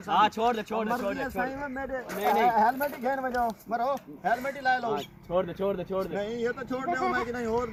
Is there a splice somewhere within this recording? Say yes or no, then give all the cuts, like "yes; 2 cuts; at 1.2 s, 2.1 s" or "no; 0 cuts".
no; 0 cuts